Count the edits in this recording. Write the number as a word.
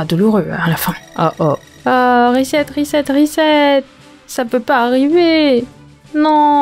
zero